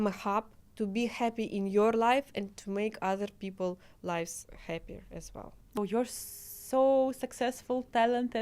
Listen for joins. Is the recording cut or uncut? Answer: cut